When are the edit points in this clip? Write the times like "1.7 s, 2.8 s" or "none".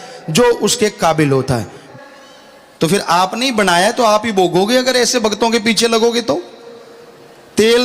1.8 s